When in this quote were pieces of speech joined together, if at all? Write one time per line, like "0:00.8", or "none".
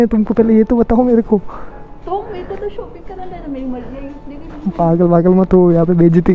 none